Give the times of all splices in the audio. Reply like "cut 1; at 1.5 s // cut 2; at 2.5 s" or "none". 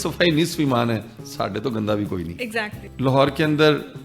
cut 1; at 2.8 s